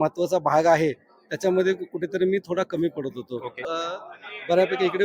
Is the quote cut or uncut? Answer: cut